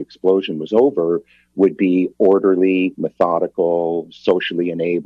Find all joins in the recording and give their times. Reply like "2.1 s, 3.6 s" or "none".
none